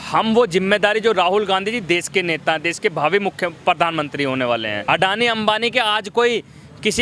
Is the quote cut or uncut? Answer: cut